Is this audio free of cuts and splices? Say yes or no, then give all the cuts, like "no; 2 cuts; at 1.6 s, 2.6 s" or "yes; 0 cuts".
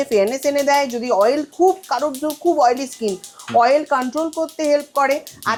yes; 0 cuts